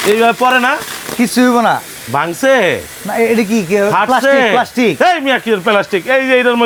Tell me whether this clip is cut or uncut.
uncut